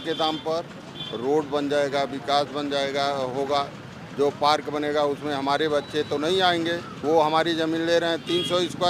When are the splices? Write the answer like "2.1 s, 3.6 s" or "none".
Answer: 6.9 s

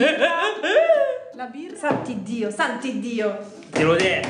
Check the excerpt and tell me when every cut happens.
1.6 s

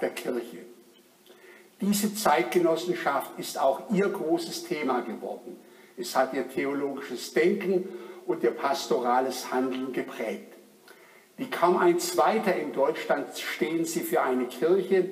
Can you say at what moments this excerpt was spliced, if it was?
8.1 s

